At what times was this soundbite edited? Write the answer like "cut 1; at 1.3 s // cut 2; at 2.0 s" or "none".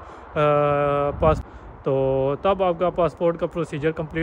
cut 1; at 1.4 s